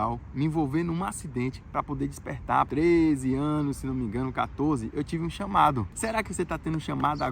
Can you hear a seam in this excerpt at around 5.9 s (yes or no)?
yes